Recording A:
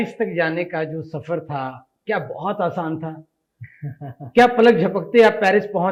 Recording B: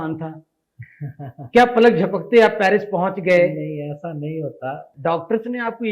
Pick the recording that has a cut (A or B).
B